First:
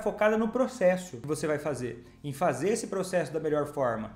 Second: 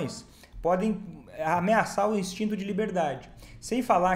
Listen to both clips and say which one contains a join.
first; 1 cut; at 1.1 s

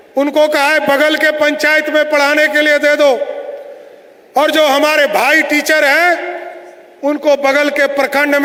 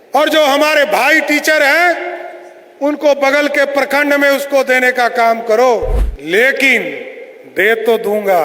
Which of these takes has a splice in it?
second; 1 cut; at 6.1 s

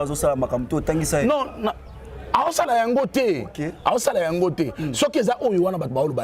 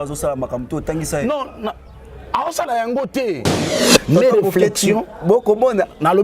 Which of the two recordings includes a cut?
second; 1 cut; at 3.7 s

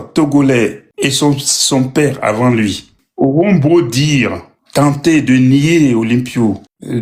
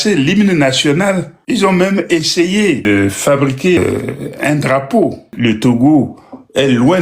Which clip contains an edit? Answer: second; 4 cuts; at 1.4 s, 2.8 s, 3.8 s, 5.3 s

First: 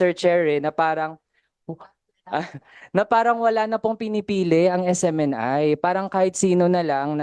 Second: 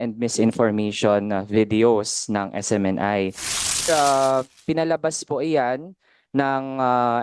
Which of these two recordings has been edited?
second; 1 cut; at 3.8 s

